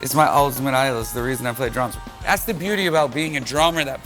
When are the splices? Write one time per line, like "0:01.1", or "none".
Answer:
0:01.9